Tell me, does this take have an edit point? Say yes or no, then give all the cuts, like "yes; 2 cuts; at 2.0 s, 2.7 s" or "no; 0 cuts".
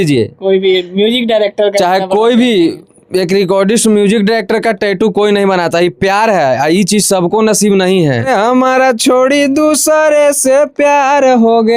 yes; 1 cut; at 8.3 s